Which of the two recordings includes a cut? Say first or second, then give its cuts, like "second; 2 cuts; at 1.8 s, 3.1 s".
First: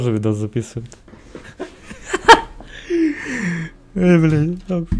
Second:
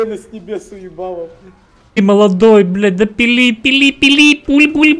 second; 1 cut; at 2.0 s